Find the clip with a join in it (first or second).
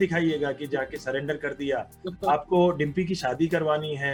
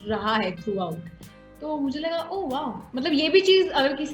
second